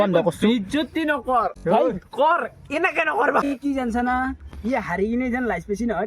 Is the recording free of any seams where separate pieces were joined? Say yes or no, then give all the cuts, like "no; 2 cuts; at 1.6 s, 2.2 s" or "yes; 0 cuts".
no; 2 cuts; at 1.6 s, 3.4 s